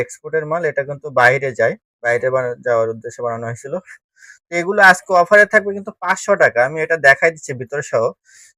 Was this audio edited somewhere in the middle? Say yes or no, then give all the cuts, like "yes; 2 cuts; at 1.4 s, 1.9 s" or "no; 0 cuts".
no; 0 cuts